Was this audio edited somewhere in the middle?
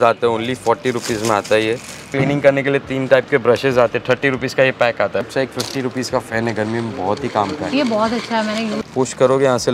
yes; 3 cuts; at 2.1 s, 5.3 s, 8.8 s

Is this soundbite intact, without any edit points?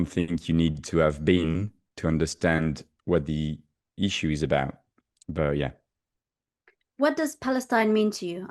yes; 0 cuts

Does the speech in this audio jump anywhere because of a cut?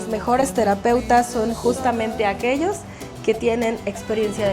no; 0 cuts

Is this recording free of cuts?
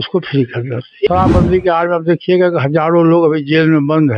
no; 1 cut; at 1.1 s

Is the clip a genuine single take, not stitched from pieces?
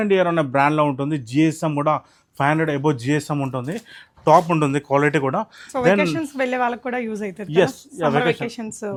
yes; 0 cuts

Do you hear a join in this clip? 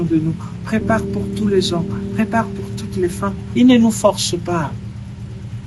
yes; 1 cut; at 3.4 s

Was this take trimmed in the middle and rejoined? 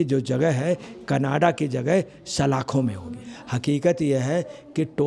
yes; 1 cut; at 3.4 s

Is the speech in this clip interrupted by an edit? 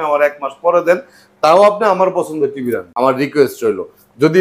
yes; 1 cut; at 2.9 s

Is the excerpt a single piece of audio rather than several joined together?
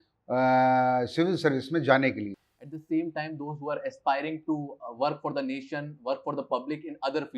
no; 1 cut; at 2.4 s

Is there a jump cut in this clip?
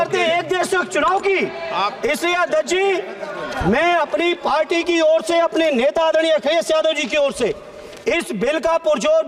no; 0 cuts

